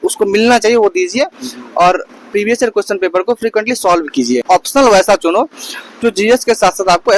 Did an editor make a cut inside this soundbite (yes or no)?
yes